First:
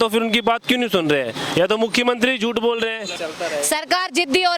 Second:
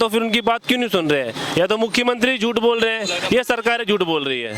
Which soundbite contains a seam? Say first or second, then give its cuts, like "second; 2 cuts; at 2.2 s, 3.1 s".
first; 1 cut; at 3.1 s